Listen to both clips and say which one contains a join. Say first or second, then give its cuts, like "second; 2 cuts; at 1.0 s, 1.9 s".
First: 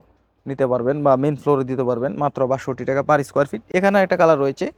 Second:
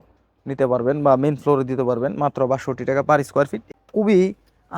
second; 1 cut; at 3.6 s